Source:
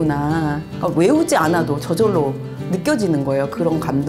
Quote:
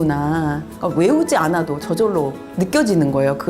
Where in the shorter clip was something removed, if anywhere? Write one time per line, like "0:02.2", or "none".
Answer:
0:02.5